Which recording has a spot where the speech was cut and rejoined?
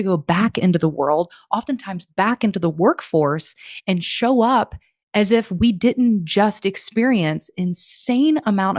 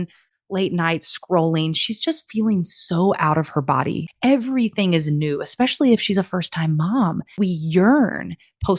second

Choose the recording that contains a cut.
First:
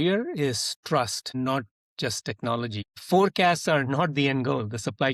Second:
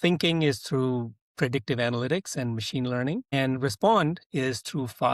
first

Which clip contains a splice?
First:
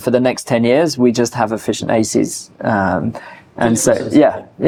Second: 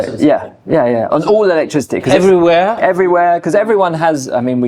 second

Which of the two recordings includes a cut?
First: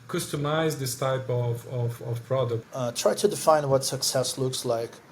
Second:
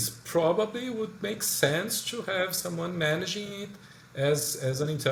first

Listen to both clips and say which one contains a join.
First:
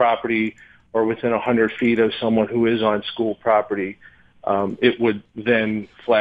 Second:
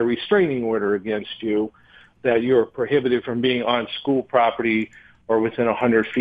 first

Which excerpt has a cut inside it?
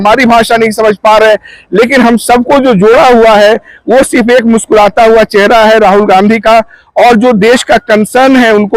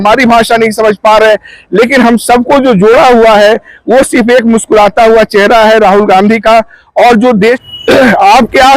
second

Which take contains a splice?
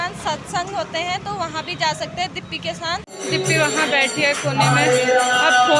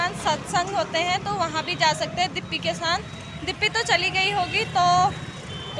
first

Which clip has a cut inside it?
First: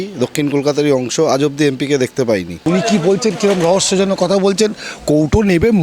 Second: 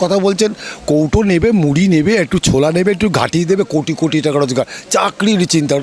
first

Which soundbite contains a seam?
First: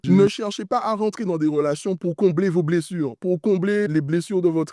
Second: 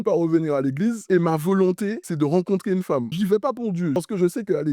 second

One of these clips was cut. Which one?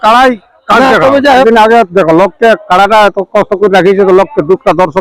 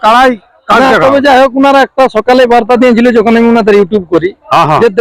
first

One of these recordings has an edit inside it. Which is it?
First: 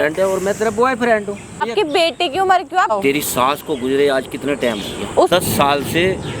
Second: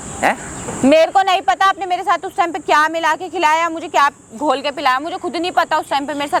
first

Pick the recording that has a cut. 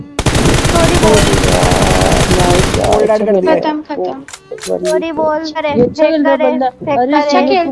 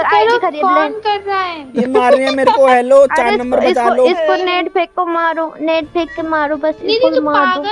first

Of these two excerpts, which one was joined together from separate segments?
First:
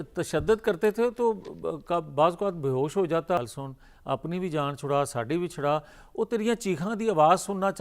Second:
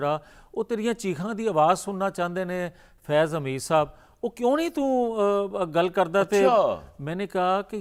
first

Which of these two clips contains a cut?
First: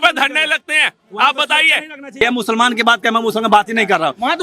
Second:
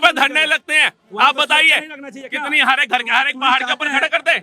first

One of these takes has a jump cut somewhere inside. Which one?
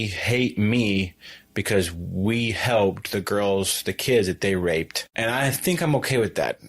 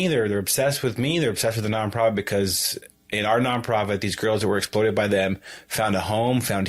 first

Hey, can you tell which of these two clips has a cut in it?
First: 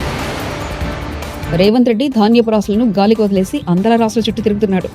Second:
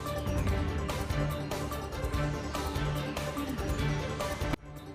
first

